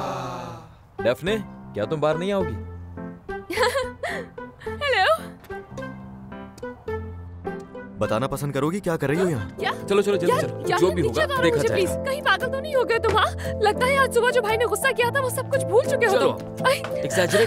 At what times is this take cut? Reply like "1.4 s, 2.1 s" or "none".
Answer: 7.8 s, 9.5 s